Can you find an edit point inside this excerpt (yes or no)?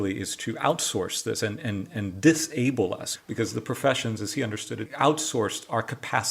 yes